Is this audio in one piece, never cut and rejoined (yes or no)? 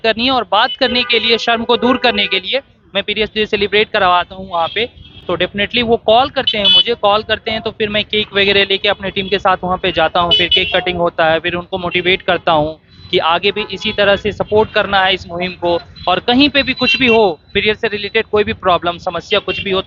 yes